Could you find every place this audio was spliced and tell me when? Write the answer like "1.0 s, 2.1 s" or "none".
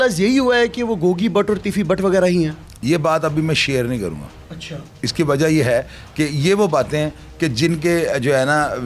none